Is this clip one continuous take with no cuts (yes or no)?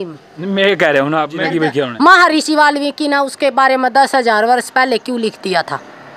no